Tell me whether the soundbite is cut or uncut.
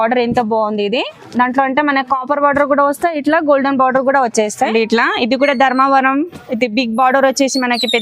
cut